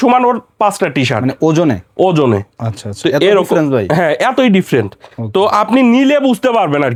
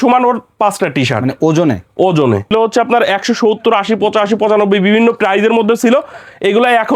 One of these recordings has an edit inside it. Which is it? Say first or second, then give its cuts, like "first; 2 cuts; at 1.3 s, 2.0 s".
second; 1 cut; at 2.5 s